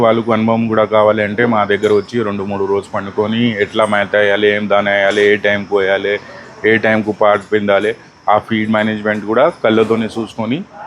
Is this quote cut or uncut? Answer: uncut